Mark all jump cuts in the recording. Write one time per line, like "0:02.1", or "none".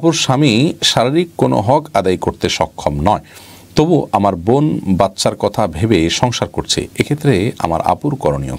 none